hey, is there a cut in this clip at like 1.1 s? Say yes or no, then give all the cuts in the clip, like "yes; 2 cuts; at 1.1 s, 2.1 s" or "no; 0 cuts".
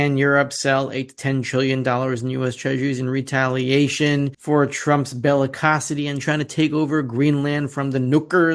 no; 0 cuts